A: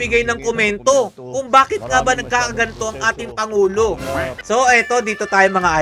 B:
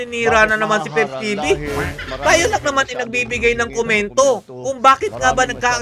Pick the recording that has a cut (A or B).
A